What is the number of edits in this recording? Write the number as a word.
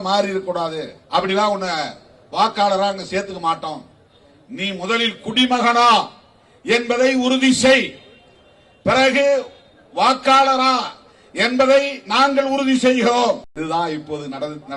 two